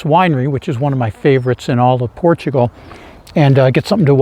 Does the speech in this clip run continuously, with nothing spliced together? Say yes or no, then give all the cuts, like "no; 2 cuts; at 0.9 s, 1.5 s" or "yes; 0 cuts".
yes; 0 cuts